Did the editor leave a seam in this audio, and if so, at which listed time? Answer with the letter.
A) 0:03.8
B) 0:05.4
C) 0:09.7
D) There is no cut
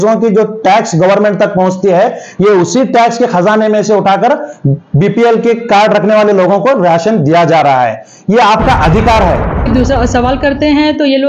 C